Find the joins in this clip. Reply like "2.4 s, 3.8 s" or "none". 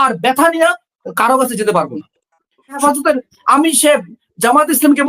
2.8 s